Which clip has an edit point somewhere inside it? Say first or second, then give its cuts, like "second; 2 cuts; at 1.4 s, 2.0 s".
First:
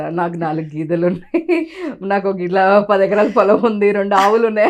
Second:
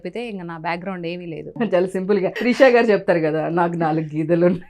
second; 2 cuts; at 1.6 s, 2.4 s